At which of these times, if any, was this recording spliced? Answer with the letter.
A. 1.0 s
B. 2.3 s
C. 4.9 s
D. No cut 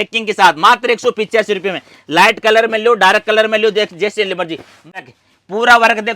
C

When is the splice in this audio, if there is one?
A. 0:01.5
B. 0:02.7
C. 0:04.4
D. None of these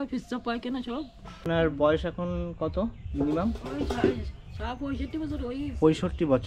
A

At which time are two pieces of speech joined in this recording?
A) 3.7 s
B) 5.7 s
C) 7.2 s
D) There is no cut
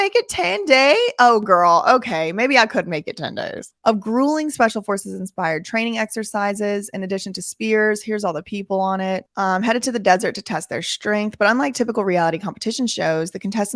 D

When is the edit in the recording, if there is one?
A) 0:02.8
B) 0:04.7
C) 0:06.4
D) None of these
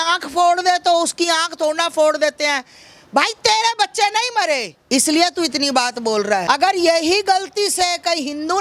C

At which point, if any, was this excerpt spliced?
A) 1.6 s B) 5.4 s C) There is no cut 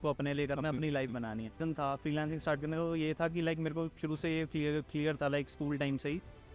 A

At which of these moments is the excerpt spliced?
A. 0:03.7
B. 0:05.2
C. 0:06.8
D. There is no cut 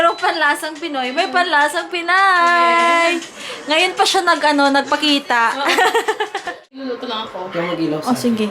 C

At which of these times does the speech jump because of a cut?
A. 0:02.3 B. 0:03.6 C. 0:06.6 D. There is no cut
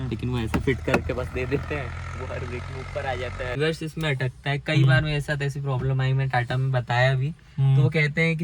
B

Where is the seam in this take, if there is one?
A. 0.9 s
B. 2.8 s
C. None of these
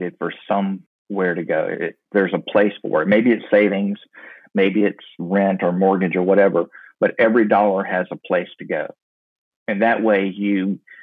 A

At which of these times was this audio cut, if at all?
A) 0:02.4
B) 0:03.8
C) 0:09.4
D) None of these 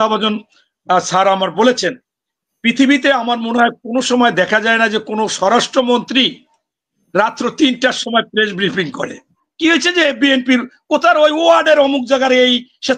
C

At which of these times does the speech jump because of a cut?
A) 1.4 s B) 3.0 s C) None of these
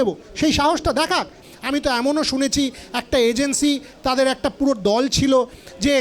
A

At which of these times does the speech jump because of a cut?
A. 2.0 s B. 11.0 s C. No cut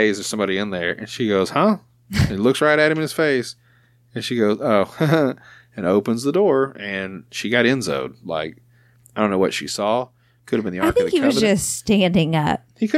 C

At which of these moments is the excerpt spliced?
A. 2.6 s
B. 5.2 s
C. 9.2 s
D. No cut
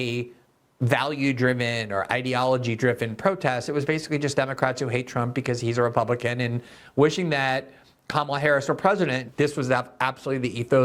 C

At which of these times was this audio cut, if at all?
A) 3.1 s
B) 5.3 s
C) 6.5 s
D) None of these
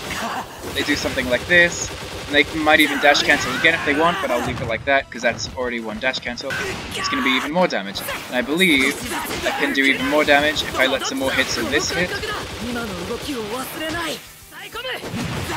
C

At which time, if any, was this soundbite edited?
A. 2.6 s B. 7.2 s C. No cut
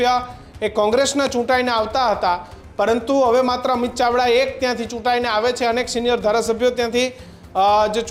C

